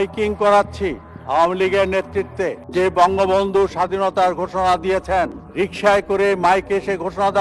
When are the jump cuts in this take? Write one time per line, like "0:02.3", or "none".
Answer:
none